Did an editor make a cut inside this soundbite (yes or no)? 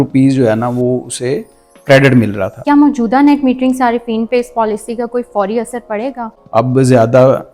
yes